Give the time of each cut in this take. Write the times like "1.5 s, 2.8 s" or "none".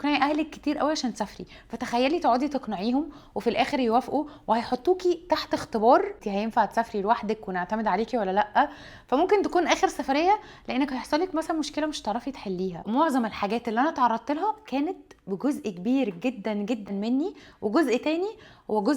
6.2 s, 12.8 s, 16.8 s